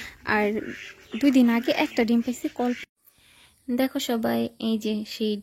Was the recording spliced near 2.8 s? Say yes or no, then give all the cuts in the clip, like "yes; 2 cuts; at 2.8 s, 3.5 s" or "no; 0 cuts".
yes; 1 cut; at 2.8 s